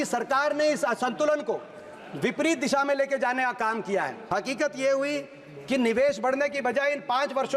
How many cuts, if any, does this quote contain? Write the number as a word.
one